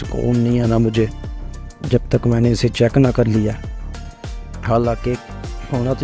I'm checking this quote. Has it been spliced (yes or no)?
no